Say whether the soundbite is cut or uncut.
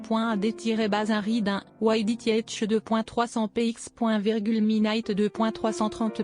cut